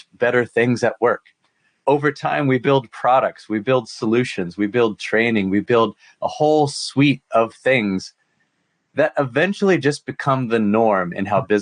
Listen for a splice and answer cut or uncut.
uncut